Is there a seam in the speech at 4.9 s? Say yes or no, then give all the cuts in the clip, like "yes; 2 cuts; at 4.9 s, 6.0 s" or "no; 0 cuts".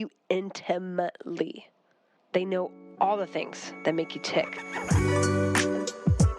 yes; 1 cut; at 4.9 s